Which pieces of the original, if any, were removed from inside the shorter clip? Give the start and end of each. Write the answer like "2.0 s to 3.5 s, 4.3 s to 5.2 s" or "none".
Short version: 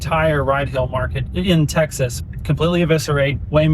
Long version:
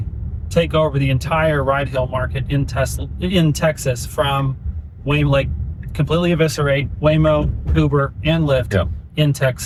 2.4 s to 3.0 s, 4.0 s to 5.7 s